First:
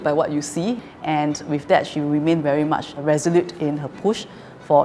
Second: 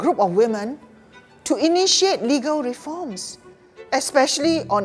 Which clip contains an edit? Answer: first; 2 cuts; at 0.9 s, 2.6 s

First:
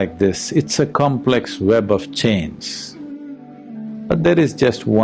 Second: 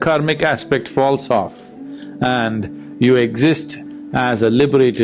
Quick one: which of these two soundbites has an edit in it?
first; 1 cut; at 3.5 s

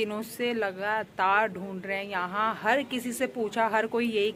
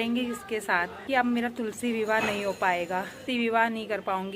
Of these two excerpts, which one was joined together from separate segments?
second; 2 cuts; at 1.0 s, 3.2 s

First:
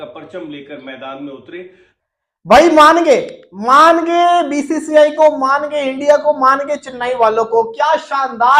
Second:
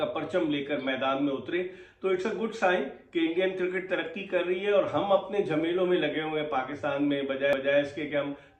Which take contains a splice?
first; 1 cut; at 1.9 s

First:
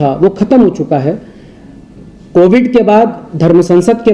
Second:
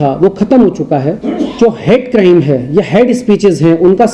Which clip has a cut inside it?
second; 1 cut; at 1.2 s

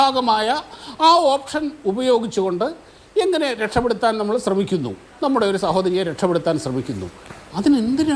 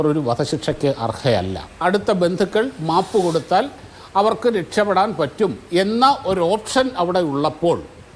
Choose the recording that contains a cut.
second; 1 cut; at 1.8 s

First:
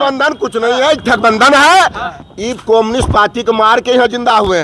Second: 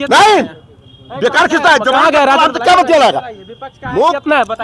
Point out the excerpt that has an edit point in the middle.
first; 1 cut; at 2.1 s

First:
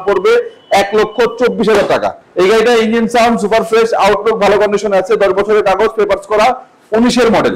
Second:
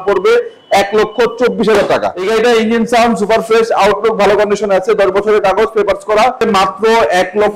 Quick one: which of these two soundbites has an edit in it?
second; 2 cuts; at 2.2 s, 6.4 s

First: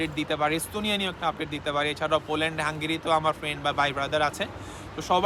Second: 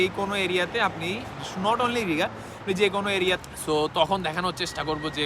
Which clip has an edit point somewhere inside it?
second; 1 cut; at 3.4 s

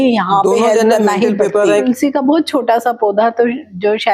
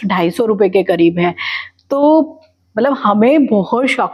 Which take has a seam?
first; 1 cut; at 1.8 s

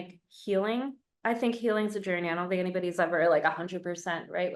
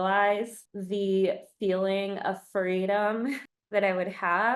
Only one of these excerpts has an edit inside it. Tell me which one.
first; 1 cut; at 1.0 s

